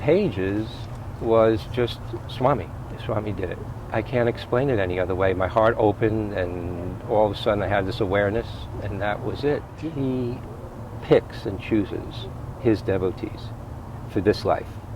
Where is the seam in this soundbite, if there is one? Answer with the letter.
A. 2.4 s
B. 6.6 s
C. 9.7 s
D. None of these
C